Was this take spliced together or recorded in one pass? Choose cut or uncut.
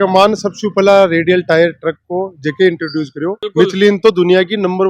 cut